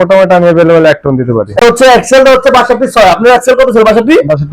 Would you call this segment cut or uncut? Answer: cut